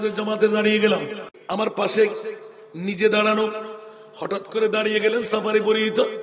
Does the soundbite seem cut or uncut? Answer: cut